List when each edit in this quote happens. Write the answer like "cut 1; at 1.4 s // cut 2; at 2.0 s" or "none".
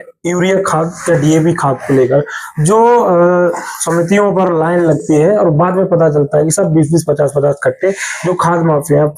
none